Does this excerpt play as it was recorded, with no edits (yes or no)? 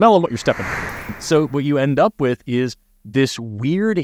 no